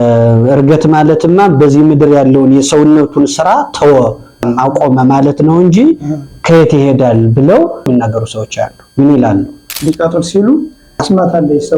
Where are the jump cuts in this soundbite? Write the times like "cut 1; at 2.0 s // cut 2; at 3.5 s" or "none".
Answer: cut 1; at 4.5 s // cut 2; at 7.9 s // cut 3; at 9.7 s